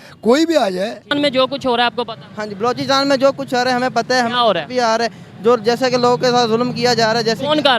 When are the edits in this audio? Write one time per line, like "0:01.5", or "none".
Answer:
0:01.1